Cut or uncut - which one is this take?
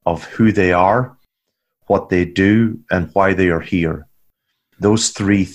uncut